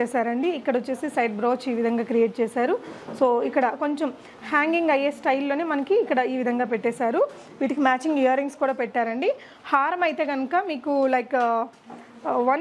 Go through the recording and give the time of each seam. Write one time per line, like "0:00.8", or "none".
none